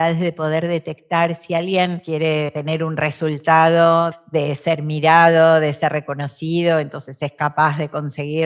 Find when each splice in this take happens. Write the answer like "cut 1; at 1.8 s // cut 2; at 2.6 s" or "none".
cut 1; at 2.3 s // cut 2; at 4.2 s